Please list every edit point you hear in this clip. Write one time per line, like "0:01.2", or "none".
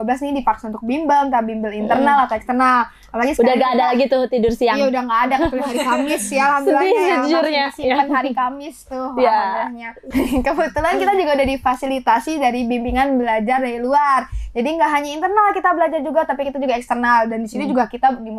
none

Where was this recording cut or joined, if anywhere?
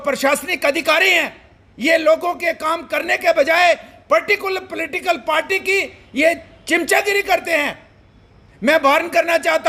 none

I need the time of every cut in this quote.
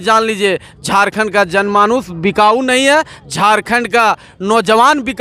none

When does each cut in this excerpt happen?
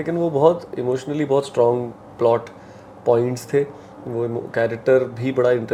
none

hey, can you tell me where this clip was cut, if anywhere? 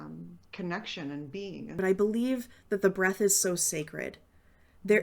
0:01.7

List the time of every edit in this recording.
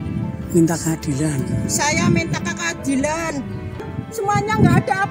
0:03.8

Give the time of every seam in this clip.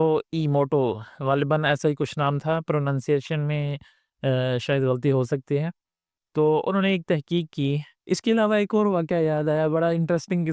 0:07.9

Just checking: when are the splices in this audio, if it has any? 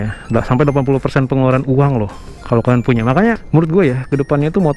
none

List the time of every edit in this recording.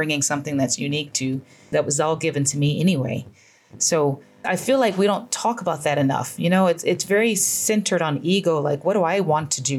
0:01.7

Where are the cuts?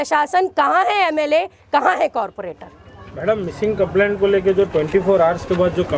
none

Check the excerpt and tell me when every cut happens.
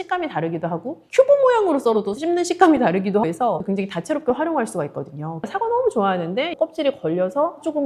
0:03.4
0:05.5
0:06.6

